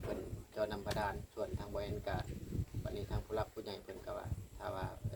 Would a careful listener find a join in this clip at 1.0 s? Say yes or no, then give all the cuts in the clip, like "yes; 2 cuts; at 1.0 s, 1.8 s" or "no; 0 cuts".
no; 0 cuts